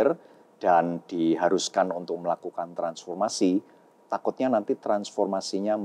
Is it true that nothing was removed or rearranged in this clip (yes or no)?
yes